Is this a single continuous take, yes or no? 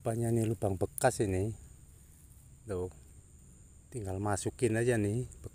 yes